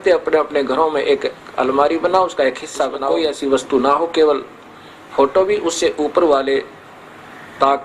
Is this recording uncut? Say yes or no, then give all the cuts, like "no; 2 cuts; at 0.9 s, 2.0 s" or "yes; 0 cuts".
no; 1 cut; at 3.1 s